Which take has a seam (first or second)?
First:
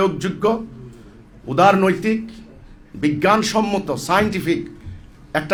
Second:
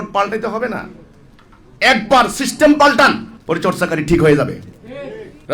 second